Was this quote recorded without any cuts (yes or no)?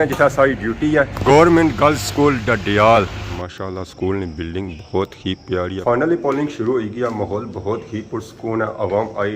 no